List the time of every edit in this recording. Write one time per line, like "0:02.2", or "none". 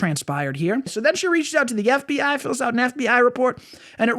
0:00.9